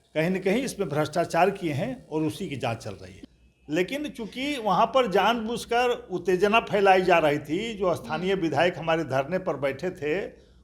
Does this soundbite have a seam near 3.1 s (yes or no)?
yes